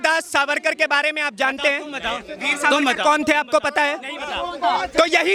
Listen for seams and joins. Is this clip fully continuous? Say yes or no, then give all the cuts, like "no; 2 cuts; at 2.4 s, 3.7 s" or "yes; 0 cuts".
yes; 0 cuts